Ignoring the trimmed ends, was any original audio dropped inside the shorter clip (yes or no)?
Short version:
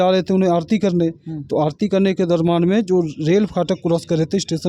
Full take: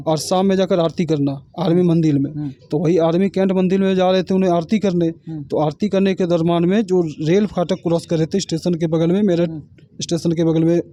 no